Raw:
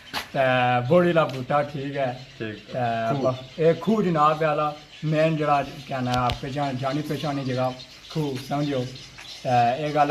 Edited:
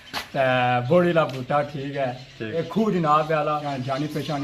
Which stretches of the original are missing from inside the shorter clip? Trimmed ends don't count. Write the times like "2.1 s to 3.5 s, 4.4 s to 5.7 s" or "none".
2.6 s to 3.7 s, 4.8 s to 6.6 s